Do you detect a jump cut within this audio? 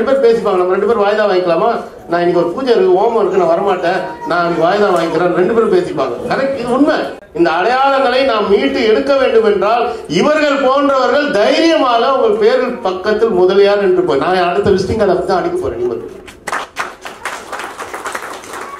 yes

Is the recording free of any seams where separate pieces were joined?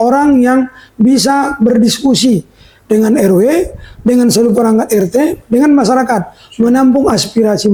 yes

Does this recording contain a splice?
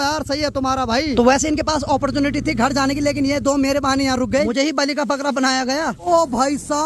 yes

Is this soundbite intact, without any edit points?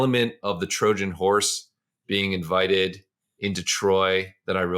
yes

